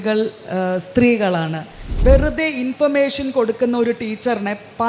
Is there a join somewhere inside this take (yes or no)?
yes